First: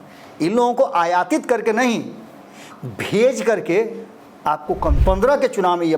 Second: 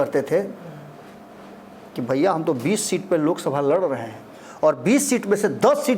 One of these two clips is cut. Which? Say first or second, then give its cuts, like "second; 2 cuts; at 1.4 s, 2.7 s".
first; 1 cut; at 5.0 s